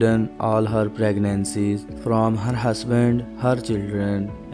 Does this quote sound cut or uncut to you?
uncut